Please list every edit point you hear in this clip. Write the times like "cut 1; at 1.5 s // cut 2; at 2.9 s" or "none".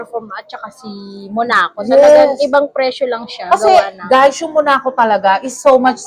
none